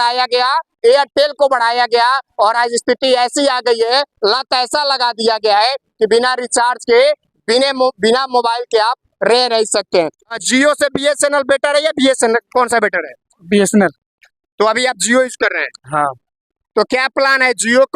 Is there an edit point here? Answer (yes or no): yes